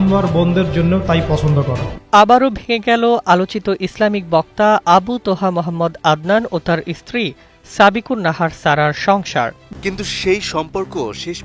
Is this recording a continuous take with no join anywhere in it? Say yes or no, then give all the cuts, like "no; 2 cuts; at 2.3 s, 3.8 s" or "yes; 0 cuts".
no; 1 cut; at 9.6 s